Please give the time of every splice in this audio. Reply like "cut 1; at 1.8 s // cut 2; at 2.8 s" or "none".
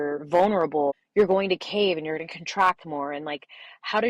cut 1; at 1.0 s